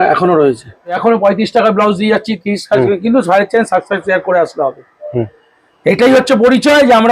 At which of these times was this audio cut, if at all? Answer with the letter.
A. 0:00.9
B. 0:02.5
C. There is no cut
A